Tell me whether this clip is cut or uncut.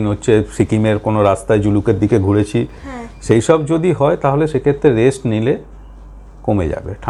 uncut